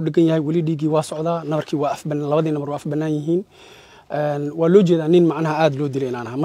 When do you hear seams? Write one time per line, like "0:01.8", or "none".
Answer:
none